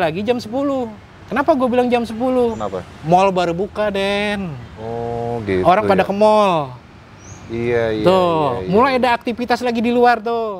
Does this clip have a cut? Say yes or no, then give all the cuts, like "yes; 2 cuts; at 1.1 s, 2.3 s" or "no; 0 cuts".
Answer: no; 0 cuts